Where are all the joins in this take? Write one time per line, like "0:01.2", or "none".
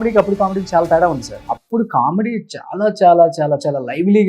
0:01.3